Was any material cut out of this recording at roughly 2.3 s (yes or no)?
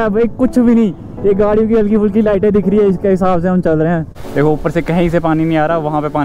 no